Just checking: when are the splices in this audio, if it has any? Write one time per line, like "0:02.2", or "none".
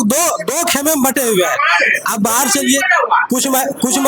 none